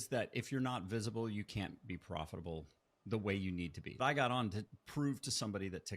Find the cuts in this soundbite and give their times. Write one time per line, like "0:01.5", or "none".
0:04.0